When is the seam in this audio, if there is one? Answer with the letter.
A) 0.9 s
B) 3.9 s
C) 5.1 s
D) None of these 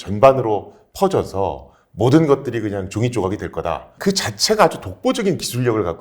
B